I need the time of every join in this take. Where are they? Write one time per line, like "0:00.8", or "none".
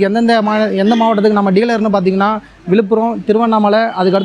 none